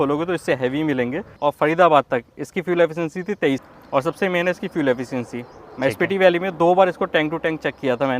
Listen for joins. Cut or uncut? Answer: cut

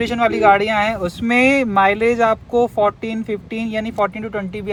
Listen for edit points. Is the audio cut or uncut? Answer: uncut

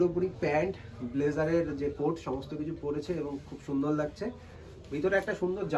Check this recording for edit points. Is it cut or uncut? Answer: uncut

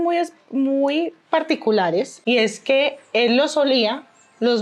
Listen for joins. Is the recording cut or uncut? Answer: cut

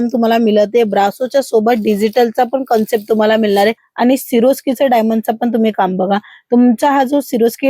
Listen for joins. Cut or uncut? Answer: cut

